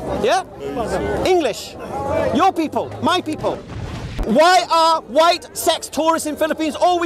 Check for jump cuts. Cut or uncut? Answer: cut